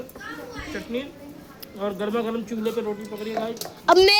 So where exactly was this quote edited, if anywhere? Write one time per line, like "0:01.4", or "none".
none

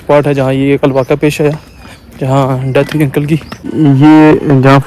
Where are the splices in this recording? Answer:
0:03.7

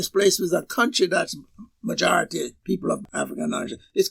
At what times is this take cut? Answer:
0:03.0

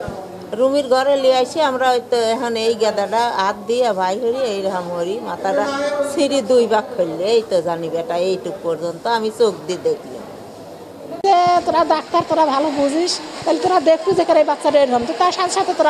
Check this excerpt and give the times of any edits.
0:11.0

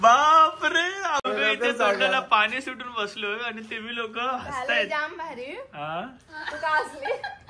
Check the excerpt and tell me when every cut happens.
0:01.3

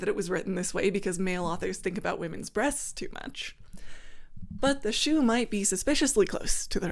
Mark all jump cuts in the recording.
none

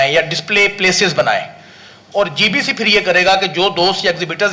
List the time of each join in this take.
none

